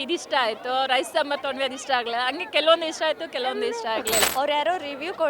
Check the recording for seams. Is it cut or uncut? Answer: cut